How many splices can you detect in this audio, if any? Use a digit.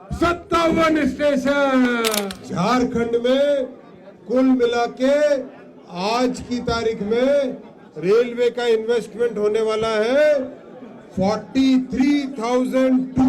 1